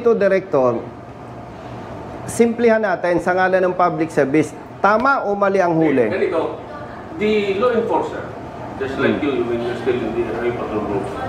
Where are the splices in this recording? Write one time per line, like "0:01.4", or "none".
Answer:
none